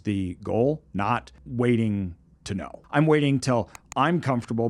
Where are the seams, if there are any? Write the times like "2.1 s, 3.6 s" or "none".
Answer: 1.4 s, 2.8 s